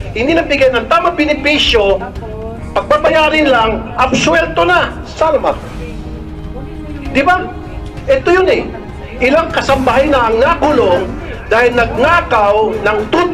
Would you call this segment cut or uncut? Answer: uncut